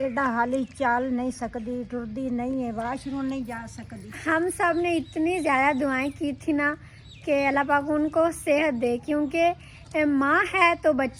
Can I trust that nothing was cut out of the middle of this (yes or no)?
yes